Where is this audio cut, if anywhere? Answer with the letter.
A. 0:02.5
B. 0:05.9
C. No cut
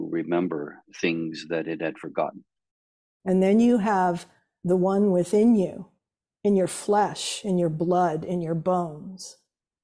A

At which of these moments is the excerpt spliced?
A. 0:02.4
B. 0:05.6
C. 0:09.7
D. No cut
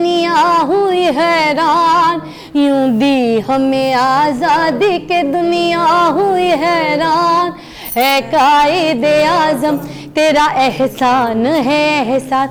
D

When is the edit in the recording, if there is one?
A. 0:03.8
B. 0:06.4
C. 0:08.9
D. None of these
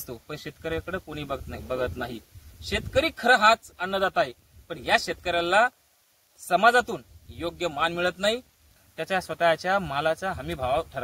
C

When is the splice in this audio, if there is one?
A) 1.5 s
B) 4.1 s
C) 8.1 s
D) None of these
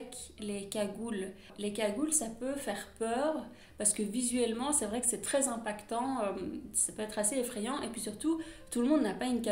A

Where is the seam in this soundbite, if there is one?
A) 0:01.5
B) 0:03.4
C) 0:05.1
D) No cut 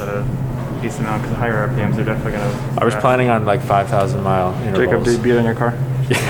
D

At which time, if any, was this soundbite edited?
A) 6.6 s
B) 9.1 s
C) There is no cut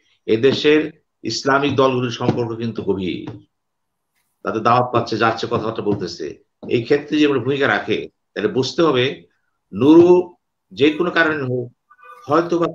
C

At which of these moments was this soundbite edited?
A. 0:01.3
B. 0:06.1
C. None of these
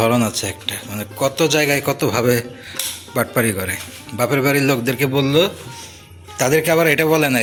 C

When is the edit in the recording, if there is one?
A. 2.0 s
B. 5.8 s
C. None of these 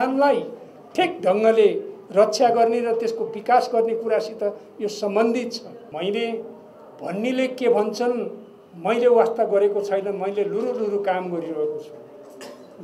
B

